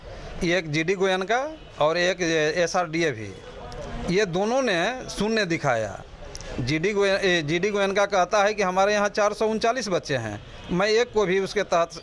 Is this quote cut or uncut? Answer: uncut